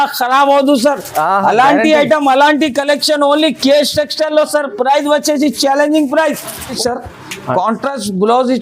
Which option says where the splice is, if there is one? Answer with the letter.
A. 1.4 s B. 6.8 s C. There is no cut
B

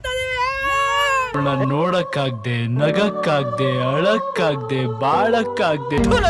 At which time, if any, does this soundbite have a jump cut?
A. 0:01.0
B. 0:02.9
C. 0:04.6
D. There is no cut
D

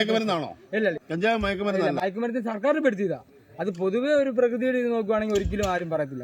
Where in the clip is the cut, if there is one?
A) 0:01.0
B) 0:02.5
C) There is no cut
A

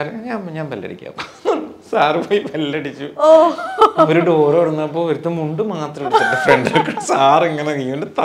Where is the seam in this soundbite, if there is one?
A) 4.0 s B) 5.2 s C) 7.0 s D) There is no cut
D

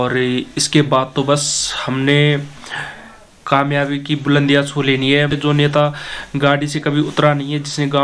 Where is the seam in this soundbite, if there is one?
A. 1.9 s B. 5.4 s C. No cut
B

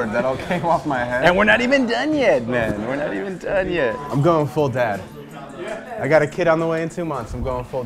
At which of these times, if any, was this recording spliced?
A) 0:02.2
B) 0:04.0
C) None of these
B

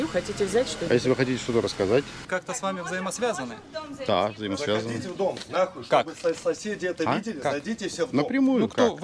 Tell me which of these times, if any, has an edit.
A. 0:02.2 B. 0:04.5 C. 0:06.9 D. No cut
A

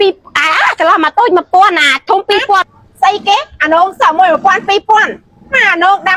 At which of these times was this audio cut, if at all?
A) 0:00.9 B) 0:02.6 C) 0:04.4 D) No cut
B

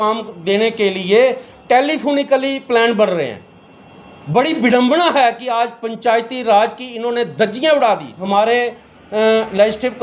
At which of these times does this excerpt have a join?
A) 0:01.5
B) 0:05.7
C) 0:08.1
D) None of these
C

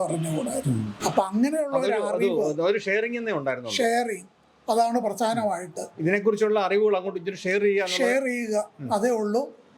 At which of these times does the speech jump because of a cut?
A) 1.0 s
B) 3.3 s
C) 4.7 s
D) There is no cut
A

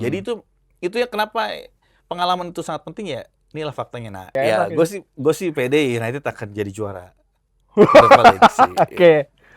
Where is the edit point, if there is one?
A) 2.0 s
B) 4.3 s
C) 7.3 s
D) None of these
B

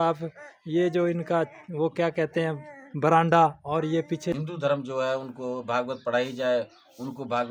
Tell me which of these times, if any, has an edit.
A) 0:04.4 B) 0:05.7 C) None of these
A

